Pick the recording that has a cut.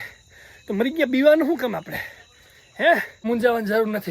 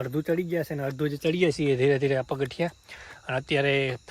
first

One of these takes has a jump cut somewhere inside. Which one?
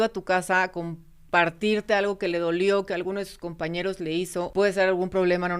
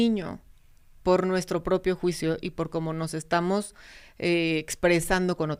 first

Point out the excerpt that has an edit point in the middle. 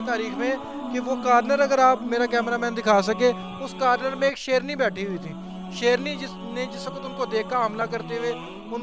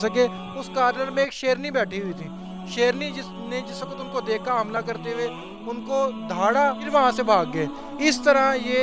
second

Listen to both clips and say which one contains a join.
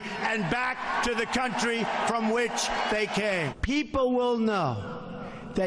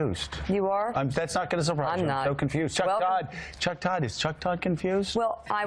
second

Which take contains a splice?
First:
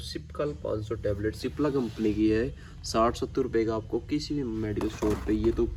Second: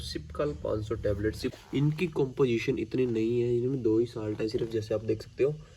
second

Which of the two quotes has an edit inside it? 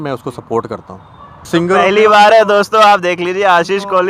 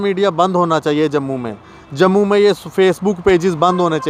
first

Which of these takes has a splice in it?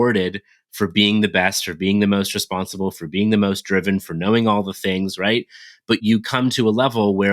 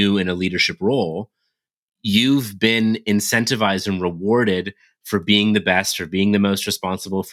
first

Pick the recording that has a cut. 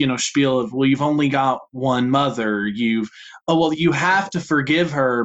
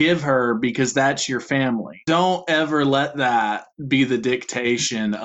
second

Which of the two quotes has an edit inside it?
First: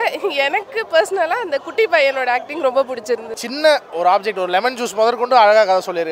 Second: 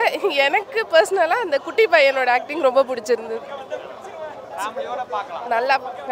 first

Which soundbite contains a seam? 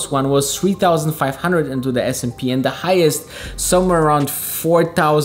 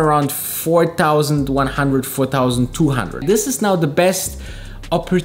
second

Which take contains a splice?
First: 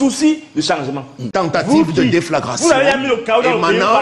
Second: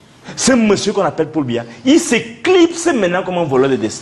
first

